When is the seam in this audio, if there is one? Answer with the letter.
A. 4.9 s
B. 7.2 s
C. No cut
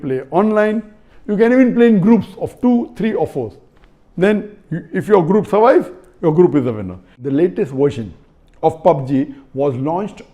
B